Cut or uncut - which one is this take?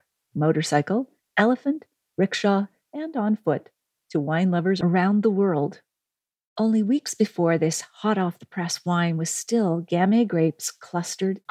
uncut